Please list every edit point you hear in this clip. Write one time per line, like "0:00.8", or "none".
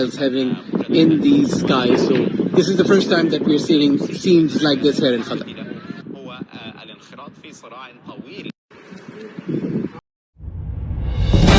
0:10.0